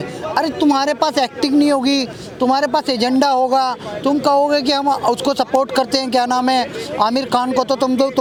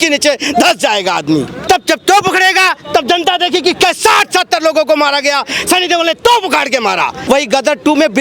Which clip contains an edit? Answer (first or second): second